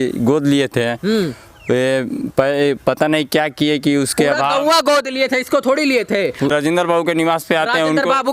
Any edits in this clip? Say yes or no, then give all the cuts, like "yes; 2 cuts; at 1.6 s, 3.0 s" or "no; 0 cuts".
yes; 1 cut; at 6.5 s